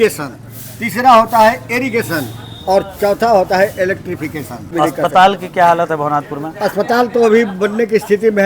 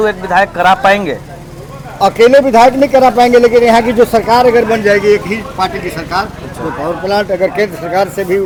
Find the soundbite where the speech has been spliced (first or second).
first